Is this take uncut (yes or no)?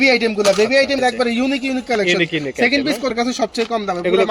no